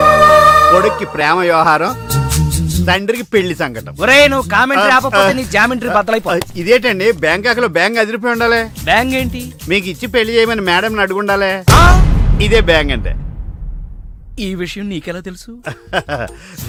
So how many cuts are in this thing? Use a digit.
0